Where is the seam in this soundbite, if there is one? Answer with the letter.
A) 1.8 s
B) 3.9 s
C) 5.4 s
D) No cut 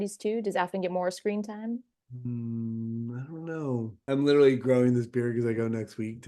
B